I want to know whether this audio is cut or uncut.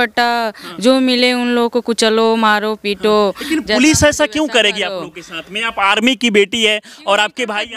uncut